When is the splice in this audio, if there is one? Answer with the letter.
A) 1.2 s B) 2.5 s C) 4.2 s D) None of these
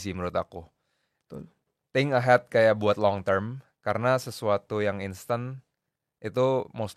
D